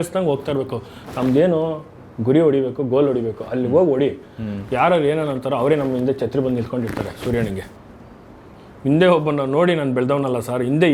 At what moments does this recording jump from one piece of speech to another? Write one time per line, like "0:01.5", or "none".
0:07.8